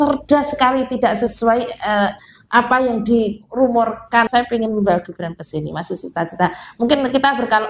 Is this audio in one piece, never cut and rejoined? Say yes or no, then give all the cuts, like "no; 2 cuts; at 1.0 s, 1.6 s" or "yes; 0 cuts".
no; 1 cut; at 4.3 s